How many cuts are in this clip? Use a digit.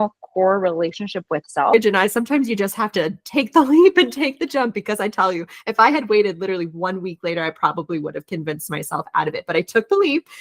1